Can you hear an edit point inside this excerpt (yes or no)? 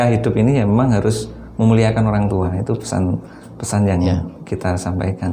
no